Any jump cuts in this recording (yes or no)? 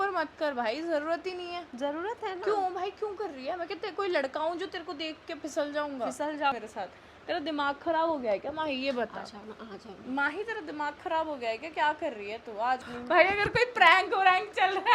yes